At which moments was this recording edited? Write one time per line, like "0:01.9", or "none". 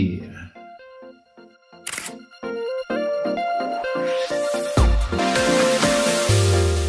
0:05.2